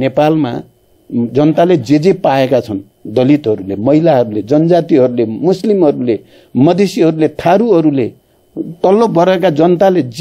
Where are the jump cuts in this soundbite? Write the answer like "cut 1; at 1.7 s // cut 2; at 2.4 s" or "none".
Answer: none